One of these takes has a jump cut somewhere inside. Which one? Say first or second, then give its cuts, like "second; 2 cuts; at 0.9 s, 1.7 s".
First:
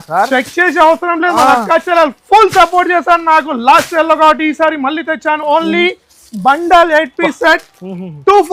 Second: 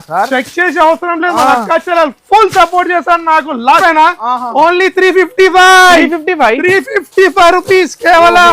second; 1 cut; at 3.8 s